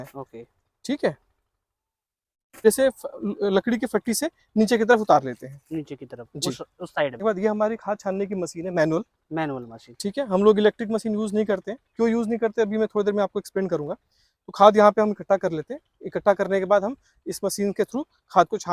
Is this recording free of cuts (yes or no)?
no